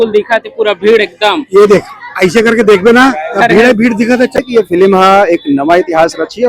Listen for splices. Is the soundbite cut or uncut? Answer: cut